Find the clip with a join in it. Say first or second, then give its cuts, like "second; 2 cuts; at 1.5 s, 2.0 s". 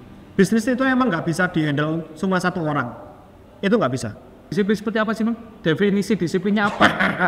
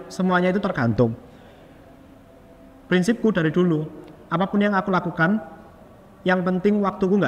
first; 1 cut; at 4.5 s